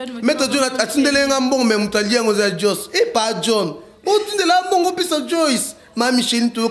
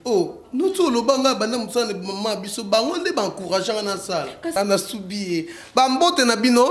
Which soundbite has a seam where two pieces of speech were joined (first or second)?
second